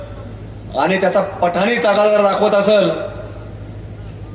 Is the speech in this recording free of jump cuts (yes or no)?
yes